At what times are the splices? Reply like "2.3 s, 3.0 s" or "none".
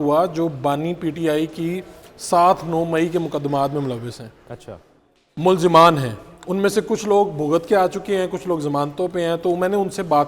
none